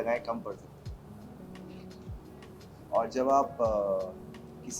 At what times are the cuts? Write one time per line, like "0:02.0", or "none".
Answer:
none